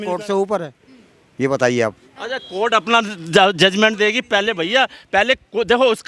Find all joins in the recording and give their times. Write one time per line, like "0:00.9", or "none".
none